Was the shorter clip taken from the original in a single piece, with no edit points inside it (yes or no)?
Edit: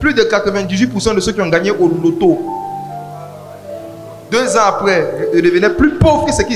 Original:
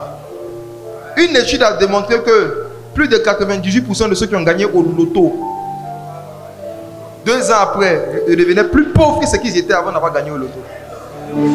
yes